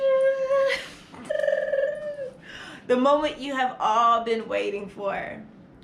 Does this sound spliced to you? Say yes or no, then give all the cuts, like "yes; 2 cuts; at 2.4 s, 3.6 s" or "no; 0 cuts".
yes; 1 cut; at 1.3 s